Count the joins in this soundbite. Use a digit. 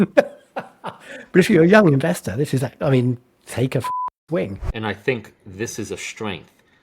1